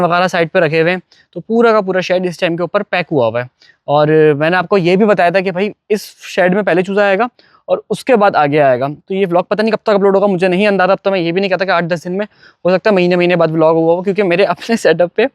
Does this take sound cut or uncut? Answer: uncut